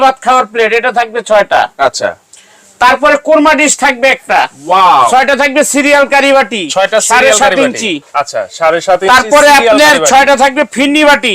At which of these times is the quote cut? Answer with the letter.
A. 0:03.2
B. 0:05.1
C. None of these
B